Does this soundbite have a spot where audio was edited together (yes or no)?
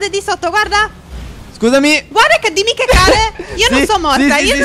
no